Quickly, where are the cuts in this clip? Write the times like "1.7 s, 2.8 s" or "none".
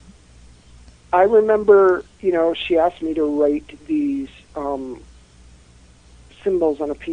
1.3 s